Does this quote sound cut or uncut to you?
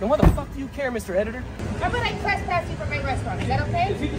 cut